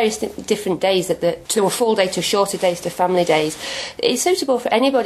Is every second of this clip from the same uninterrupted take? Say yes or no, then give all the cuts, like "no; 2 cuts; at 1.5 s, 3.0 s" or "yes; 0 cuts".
no; 1 cut; at 1.4 s